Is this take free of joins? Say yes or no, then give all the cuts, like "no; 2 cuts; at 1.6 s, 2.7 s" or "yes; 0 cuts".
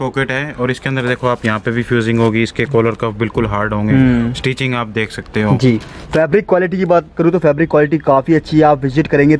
no; 1 cut; at 5.9 s